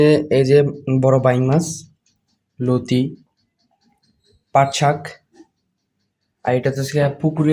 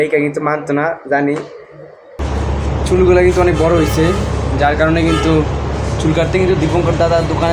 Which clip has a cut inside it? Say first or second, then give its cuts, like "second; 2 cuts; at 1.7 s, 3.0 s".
second; 1 cut; at 2.1 s